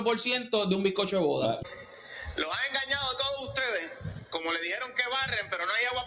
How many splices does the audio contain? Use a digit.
1